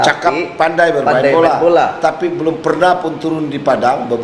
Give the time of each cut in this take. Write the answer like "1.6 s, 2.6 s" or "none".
none